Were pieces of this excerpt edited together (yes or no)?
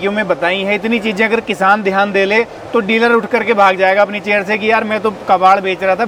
no